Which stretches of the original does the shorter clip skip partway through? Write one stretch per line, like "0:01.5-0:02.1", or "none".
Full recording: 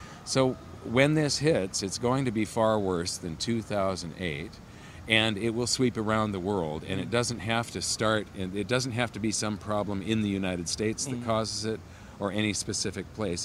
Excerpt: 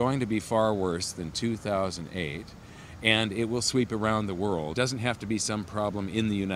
0:06.8-0:08.7